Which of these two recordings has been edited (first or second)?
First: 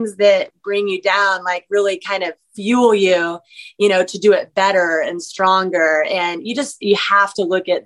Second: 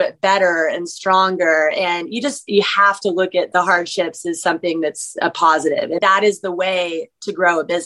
second